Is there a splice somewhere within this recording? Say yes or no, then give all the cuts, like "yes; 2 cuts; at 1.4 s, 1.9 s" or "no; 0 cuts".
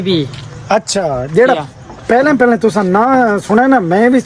no; 0 cuts